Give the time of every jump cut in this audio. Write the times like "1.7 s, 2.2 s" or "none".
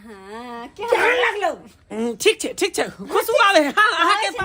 1.8 s